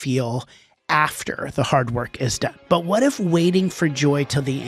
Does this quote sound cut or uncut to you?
cut